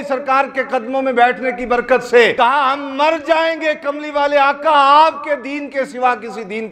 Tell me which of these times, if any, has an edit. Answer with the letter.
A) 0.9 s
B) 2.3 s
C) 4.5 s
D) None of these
B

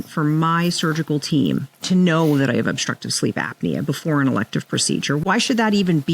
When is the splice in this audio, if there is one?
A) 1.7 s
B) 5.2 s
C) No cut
B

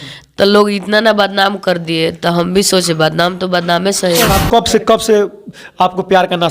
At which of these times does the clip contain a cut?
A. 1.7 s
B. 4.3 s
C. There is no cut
B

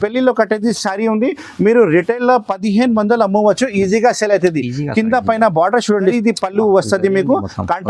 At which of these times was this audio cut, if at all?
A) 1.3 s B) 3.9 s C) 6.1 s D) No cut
C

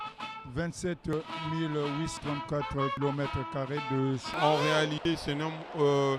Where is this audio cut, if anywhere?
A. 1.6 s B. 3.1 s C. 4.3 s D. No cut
C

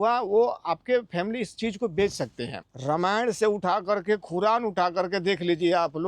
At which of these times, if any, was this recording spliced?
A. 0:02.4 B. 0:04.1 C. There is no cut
A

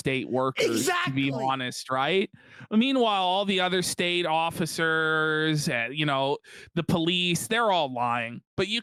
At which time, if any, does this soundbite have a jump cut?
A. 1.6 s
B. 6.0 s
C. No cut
C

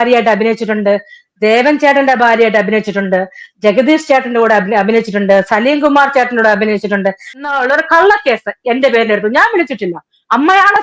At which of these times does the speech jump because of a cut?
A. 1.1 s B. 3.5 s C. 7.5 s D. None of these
C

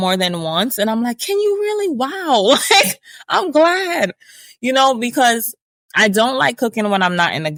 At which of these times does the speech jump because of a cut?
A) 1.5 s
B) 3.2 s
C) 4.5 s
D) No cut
D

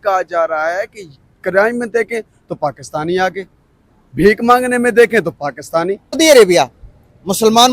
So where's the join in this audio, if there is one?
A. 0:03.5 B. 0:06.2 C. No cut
B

